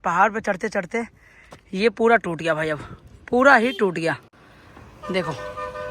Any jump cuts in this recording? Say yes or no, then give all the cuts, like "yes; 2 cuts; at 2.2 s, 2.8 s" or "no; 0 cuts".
no; 0 cuts